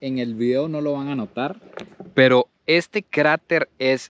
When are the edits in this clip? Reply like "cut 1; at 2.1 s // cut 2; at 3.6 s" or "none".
none